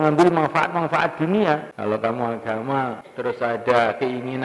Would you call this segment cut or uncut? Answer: cut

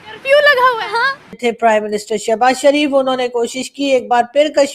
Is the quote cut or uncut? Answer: cut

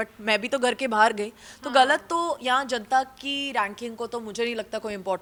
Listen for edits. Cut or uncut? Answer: uncut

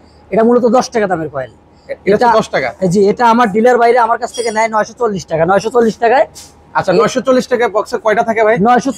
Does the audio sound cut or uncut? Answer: uncut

